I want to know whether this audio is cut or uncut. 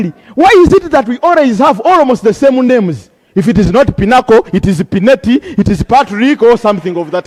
uncut